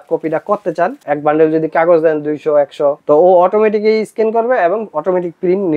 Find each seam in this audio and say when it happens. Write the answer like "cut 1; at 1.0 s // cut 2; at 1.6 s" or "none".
cut 1; at 1.0 s // cut 2; at 3.0 s